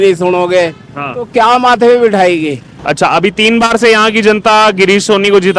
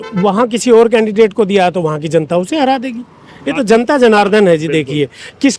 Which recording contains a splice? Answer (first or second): first